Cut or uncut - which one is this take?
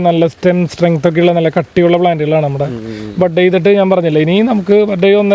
uncut